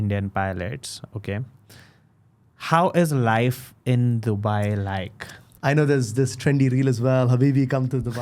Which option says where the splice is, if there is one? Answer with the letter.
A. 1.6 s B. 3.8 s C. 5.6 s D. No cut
C